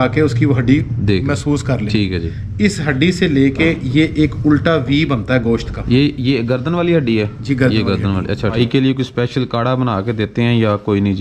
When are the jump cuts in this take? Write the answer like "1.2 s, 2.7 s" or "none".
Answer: 8.6 s